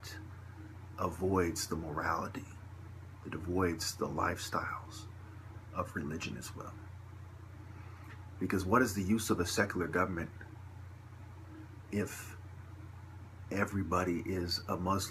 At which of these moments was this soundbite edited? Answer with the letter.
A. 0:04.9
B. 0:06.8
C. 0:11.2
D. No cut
B